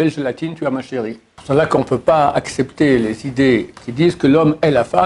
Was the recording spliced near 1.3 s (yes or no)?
yes